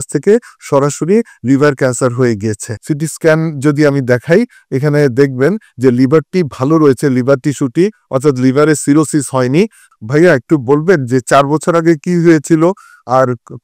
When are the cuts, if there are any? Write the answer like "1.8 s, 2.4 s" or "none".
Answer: 2.7 s, 9.8 s